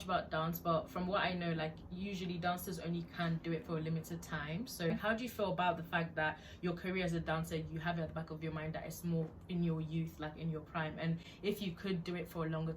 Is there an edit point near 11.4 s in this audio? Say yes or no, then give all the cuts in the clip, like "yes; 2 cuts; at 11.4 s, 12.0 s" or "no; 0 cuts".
no; 1 cut; at 4.9 s